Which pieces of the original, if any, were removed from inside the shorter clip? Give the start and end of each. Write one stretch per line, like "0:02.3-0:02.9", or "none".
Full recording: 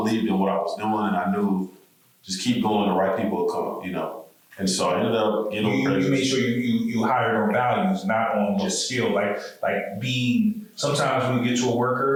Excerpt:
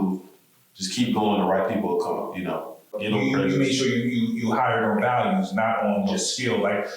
0:04.5-0:05.5